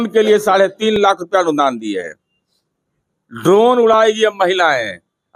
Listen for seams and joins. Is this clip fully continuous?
yes; 0 cuts

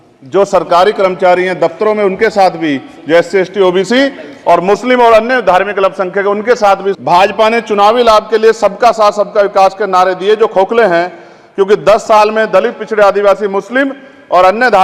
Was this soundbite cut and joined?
yes; 1 cut; at 7.0 s

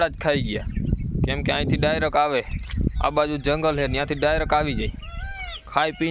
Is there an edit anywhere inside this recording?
no; 0 cuts

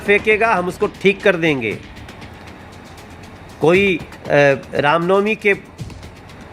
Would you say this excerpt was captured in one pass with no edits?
yes; 0 cuts

